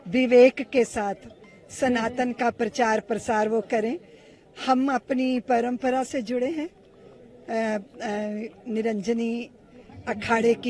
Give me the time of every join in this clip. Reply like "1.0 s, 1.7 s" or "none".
none